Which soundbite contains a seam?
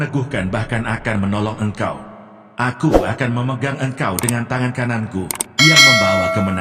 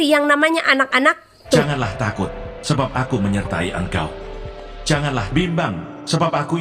second; 1 cut; at 1.7 s

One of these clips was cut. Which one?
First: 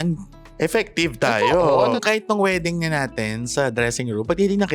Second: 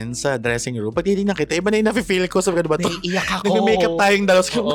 first; 1 cut; at 2.0 s

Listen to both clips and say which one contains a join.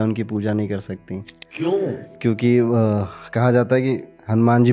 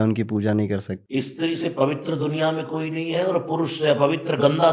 second; 1 cut; at 1.0 s

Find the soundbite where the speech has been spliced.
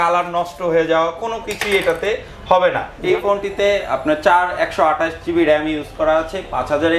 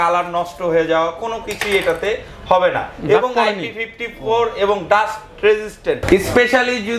first; 1 cut; at 2.9 s

